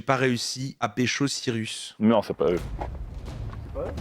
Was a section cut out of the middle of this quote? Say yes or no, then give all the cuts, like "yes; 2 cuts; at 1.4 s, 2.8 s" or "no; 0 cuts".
yes; 1 cut; at 1.8 s